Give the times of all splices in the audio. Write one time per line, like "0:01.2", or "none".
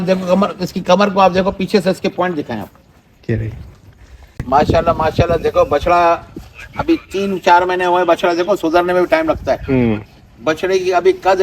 0:04.4